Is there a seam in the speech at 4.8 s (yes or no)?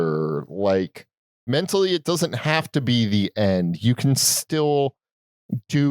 no